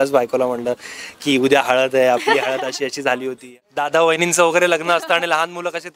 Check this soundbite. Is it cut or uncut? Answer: cut